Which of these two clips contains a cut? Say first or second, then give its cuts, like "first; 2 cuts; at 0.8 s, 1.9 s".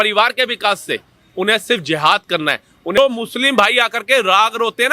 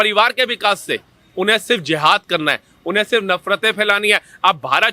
first; 1 cut; at 3.0 s